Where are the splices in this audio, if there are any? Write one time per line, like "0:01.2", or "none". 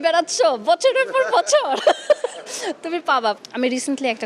0:03.4

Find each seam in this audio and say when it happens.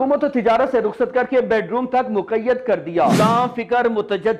0:03.2

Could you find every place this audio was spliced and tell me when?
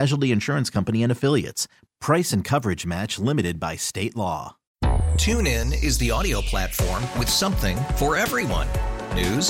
0:04.6

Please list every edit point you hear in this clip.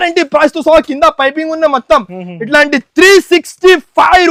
none

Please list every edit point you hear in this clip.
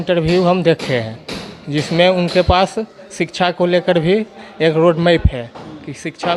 none

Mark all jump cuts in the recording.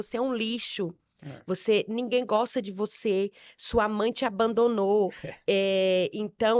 none

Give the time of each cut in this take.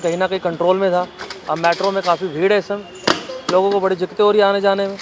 none

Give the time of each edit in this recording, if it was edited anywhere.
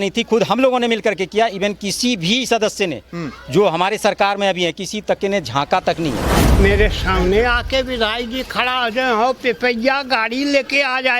0:06.5

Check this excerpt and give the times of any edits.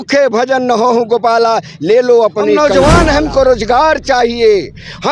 0:02.6

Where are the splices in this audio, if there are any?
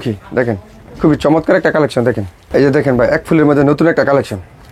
0:02.4

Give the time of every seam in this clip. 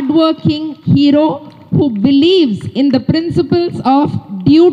none

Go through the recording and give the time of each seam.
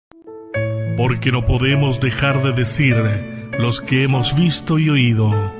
0:01.0

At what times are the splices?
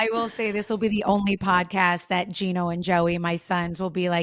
none

